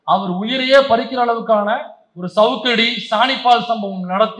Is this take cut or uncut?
uncut